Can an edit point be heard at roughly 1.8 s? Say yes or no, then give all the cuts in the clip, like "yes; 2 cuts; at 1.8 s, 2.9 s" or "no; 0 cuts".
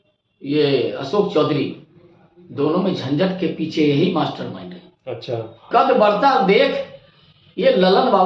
no; 1 cut; at 5.7 s